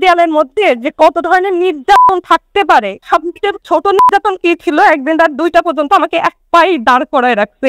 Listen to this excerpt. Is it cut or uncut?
cut